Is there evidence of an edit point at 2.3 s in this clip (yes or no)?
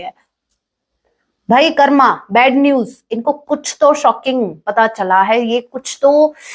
no